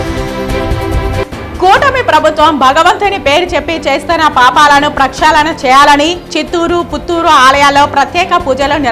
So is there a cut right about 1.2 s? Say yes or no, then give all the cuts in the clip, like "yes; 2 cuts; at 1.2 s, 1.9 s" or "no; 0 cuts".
yes; 1 cut; at 1.2 s